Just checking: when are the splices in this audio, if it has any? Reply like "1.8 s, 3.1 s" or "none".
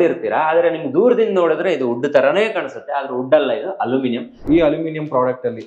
4.4 s